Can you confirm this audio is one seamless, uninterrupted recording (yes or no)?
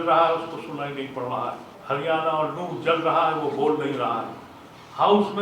no